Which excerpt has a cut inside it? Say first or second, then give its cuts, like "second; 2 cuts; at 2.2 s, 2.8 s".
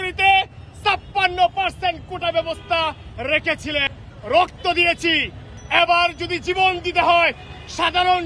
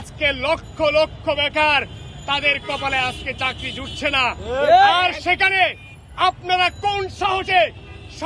first; 1 cut; at 3.9 s